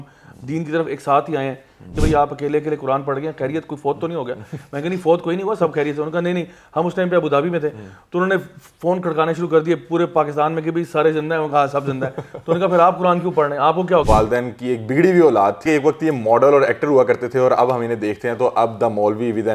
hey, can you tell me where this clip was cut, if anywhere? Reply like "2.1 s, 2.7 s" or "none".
1.9 s, 14.0 s, 15.6 s